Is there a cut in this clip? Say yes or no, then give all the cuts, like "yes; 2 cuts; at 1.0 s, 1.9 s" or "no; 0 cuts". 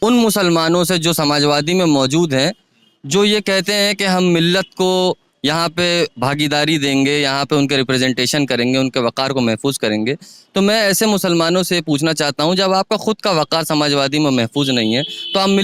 no; 0 cuts